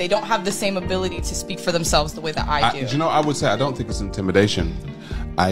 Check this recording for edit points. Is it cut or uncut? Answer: cut